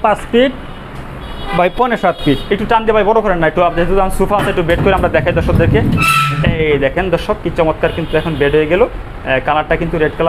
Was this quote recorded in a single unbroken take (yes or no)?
yes